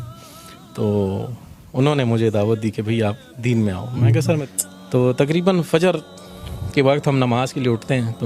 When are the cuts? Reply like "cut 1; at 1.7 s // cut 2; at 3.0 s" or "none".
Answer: cut 1; at 4.4 s